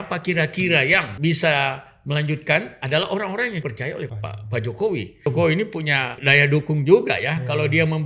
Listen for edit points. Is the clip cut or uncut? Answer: cut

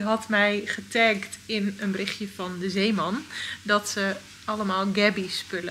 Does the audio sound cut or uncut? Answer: uncut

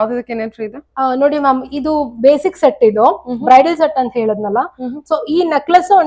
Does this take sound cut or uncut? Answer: uncut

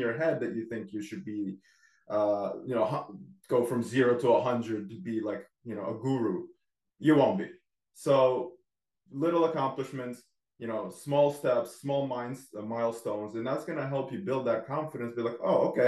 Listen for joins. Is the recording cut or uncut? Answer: uncut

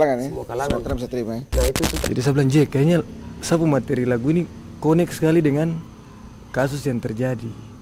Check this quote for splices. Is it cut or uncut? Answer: cut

